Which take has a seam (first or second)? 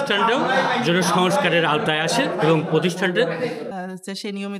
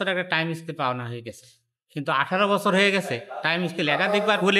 first